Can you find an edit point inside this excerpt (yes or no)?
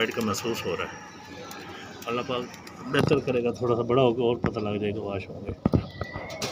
no